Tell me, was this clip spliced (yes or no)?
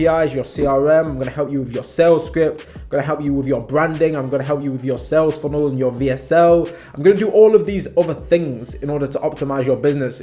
no